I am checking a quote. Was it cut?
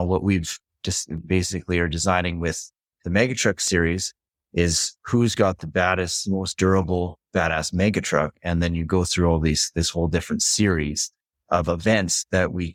no; 0 cuts

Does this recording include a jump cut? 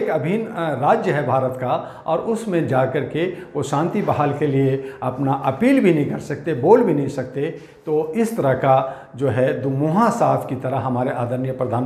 no; 0 cuts

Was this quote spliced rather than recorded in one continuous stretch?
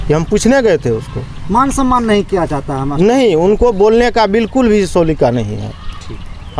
no; 0 cuts

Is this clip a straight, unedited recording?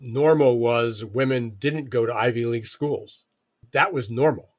no; 1 cut; at 3.6 s

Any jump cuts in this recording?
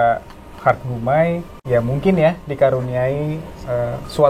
yes; 1 cut; at 1.6 s

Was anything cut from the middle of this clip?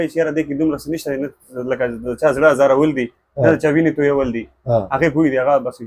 no; 0 cuts

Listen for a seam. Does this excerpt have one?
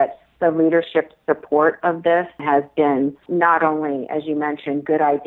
yes; 2 cuts; at 2.4 s, 3.2 s

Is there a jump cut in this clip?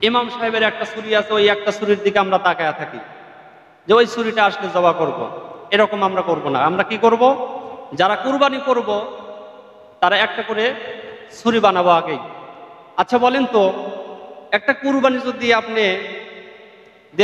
no; 0 cuts

